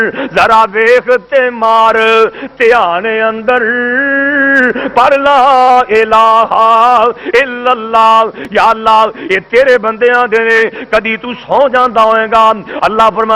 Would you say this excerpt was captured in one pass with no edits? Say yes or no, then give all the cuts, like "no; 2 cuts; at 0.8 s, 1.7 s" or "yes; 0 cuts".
yes; 0 cuts